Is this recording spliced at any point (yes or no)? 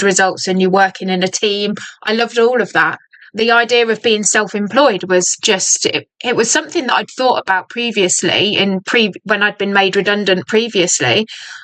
no